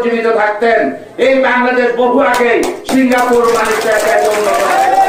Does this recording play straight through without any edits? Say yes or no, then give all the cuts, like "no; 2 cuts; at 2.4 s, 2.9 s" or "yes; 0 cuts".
yes; 0 cuts